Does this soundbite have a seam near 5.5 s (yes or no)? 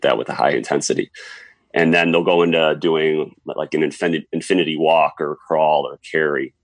no